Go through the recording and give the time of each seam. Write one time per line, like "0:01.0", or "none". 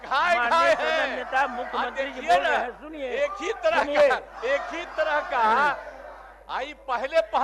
none